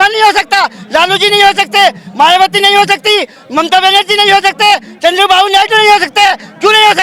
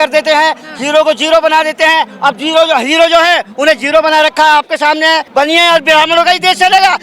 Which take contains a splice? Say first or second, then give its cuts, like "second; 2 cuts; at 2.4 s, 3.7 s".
second; 1 cut; at 5.3 s